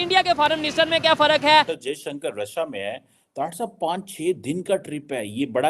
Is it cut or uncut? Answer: cut